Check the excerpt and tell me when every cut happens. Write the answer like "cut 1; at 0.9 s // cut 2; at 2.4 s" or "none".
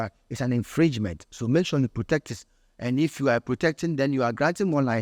none